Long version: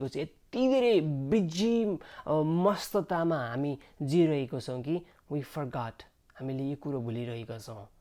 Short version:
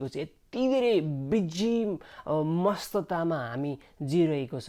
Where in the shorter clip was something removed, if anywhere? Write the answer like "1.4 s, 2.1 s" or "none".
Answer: none